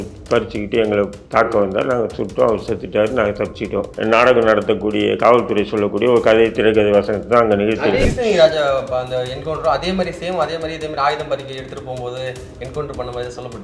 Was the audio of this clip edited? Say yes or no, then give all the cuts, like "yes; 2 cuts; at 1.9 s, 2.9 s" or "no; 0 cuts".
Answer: yes; 2 cuts; at 3.9 s, 8.0 s